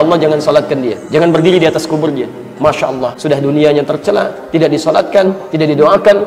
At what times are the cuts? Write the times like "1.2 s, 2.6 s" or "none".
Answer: 1.0 s, 3.2 s